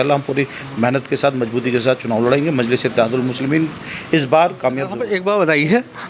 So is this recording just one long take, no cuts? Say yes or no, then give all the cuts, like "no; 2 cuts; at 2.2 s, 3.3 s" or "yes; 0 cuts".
no; 1 cut; at 5.0 s